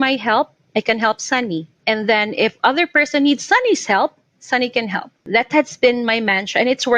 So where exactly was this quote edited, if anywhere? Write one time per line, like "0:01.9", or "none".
0:01.7
0:05.2

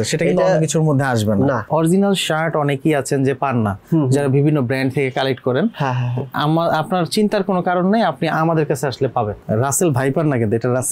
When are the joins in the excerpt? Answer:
0:01.7
0:09.4

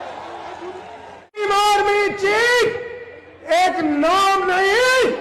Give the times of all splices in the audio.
0:01.4

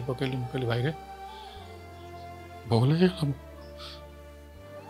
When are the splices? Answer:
0:01.0
0:02.7
0:03.4

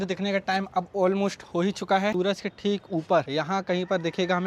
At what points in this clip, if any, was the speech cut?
0:02.1

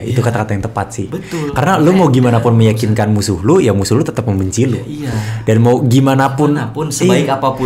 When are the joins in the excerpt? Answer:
none

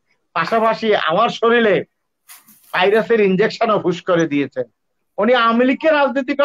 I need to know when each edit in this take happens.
none

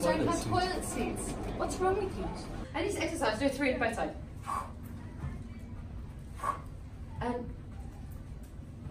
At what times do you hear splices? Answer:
0:02.6

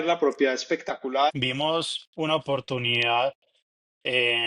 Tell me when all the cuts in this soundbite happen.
0:01.3

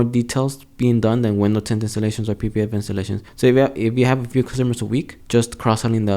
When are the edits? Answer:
0:03.2
0:05.2

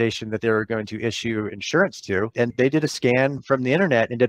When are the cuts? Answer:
none

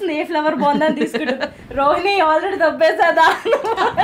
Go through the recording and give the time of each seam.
none

